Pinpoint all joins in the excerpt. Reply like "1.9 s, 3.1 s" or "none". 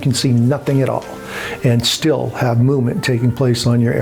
none